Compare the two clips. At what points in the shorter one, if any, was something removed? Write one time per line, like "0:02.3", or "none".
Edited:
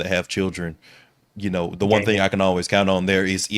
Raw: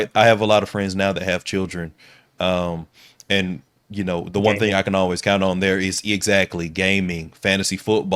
0:01.1